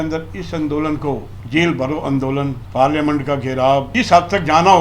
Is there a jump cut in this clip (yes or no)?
yes